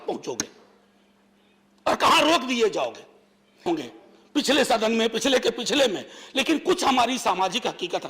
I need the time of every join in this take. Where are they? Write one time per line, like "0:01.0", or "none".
0:03.7